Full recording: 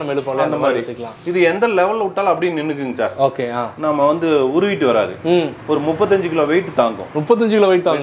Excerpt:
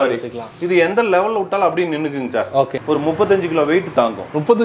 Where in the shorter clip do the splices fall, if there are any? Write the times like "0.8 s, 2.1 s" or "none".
2.8 s

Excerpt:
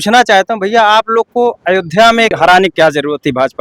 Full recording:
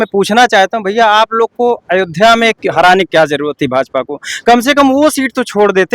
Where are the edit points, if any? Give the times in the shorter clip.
2.3 s

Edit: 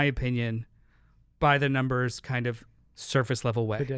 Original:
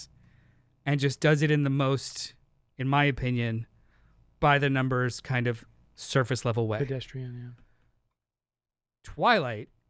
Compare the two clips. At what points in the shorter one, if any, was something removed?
none

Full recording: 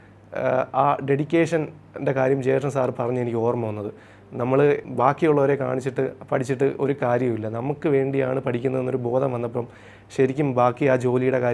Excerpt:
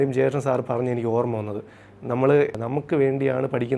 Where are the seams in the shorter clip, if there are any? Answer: 2.6 s

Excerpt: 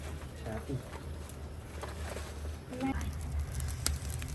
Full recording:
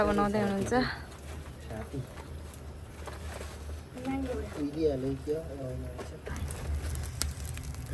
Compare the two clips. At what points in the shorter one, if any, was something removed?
2.9 s

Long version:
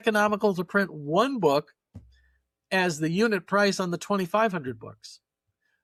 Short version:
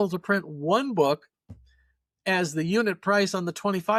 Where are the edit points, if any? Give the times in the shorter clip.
none

